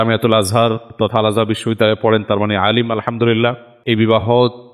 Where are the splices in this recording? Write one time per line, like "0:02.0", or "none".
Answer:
0:03.7